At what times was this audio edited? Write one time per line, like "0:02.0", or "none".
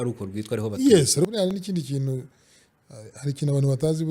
0:01.3

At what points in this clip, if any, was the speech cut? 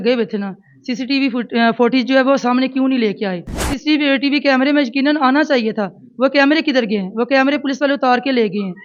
0:03.7

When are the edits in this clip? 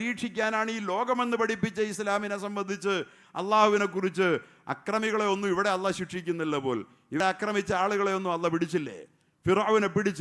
0:07.2

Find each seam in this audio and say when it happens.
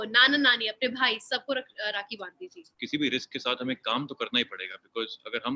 0:02.7

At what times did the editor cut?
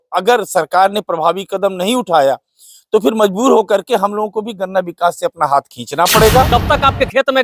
0:06.5

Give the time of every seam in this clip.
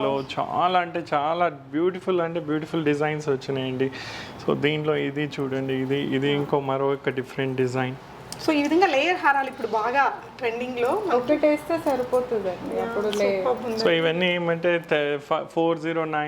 none

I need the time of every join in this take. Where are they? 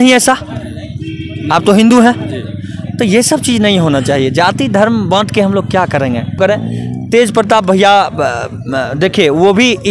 0:06.4

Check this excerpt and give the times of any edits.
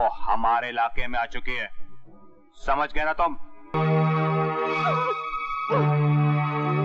0:03.7

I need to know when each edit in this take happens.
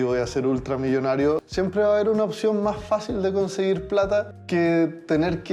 0:01.4
0:04.4

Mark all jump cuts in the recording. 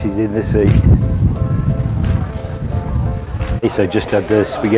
0:03.6

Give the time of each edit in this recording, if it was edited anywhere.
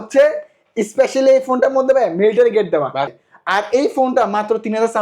0:03.1

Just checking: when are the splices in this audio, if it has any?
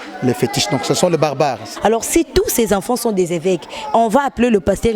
0:01.7

